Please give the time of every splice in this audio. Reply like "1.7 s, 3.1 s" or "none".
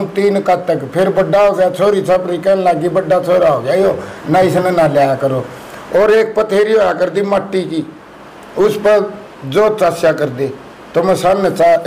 none